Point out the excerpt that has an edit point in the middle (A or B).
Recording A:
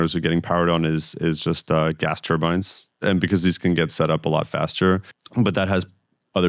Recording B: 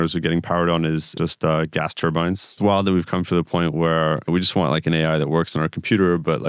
B